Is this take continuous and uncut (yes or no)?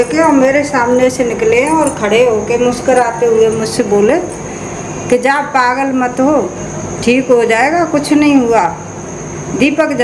yes